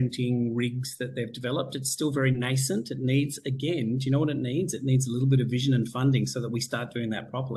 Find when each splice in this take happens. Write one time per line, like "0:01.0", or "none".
none